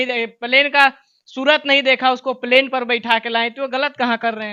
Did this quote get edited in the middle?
no; 0 cuts

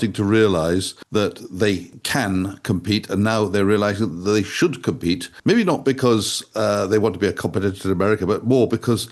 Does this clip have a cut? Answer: yes; 3 cuts; at 1.0 s, 1.9 s, 5.3 s

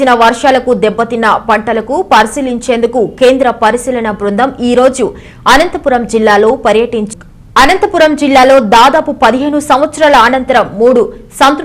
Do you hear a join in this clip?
no; 0 cuts

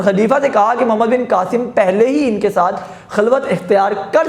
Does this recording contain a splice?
no; 0 cuts

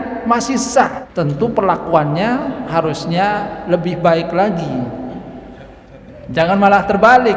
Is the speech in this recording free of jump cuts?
no; 2 cuts; at 1.0 s, 5.9 s

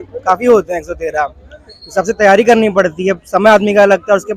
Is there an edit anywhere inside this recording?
no; 0 cuts

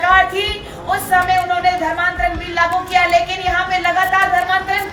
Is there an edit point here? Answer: no; 0 cuts

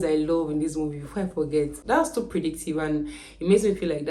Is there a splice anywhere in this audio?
yes; 1 cut; at 1.8 s

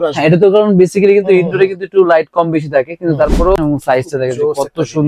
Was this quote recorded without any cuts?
no; 1 cut; at 3.6 s

